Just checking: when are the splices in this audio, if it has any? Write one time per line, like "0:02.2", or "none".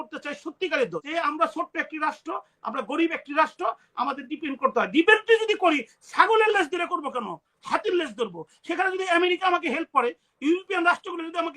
0:01.0